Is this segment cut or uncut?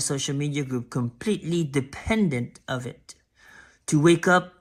uncut